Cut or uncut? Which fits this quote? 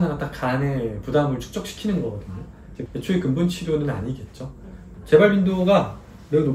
cut